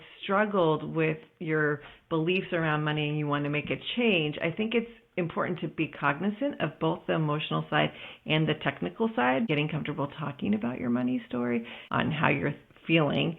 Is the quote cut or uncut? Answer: cut